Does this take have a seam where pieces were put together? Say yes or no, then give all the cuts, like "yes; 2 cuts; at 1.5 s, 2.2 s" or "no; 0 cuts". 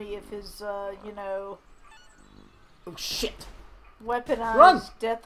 no; 0 cuts